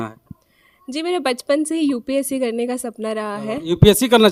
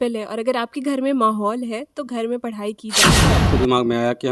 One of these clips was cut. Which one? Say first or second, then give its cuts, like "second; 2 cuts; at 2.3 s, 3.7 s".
second; 1 cut; at 3.2 s